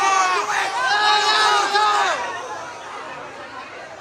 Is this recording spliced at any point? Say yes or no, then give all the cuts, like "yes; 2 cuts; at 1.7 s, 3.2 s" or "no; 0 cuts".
no; 0 cuts